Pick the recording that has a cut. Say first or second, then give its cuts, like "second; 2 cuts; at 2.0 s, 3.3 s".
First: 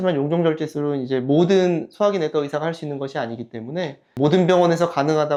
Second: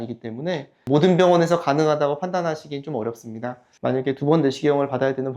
second; 1 cut; at 3.7 s